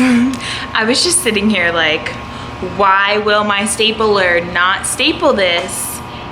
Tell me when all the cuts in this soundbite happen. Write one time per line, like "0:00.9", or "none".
none

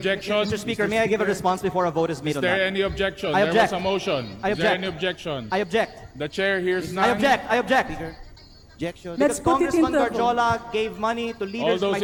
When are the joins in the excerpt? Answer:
none

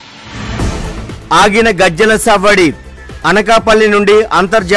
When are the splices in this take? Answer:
none

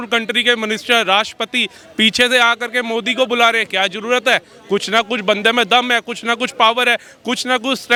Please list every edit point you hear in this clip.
none

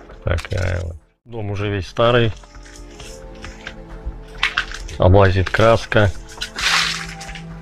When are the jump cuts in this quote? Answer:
0:01.5

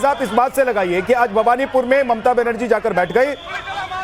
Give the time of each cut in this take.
0:02.2

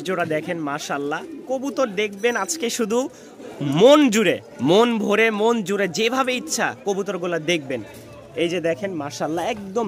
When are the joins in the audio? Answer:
none

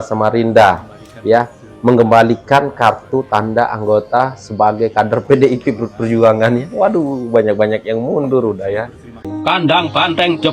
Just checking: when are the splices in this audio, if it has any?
0:09.3

